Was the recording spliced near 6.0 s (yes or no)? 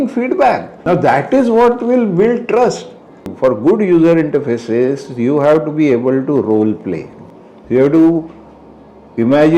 no